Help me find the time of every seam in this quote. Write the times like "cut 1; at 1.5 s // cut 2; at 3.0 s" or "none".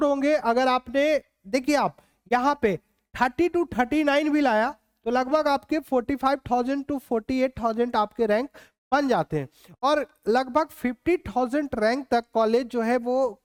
none